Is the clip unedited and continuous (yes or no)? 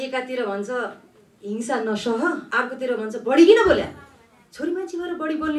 no